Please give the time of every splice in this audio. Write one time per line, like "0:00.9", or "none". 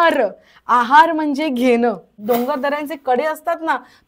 0:02.1

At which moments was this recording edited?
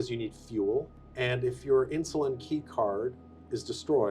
0:01.0

